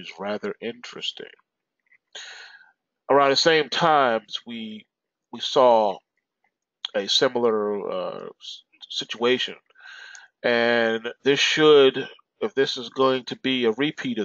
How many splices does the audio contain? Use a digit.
1